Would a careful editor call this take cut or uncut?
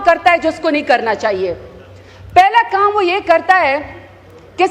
uncut